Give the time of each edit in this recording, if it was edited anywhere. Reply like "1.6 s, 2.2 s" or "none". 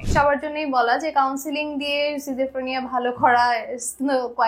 none